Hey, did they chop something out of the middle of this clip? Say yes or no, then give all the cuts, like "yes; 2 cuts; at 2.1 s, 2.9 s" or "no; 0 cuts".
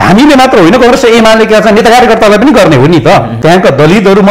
yes; 1 cut; at 3.3 s